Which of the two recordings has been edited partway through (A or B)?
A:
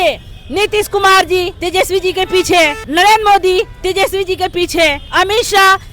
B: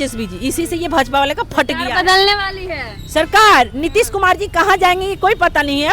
A